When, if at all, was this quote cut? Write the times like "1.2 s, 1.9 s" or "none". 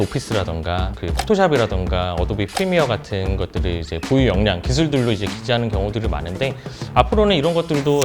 0.9 s